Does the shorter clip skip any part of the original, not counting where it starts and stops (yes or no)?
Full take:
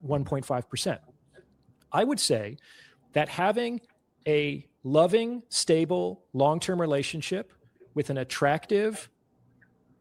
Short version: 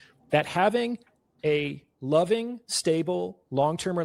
no